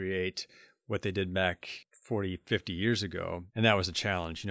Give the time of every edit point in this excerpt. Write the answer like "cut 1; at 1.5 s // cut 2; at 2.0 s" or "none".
cut 1; at 3.4 s